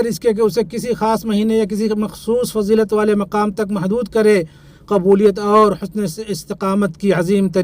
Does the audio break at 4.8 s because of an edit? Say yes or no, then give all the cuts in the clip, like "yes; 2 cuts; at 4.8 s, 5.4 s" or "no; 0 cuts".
no; 0 cuts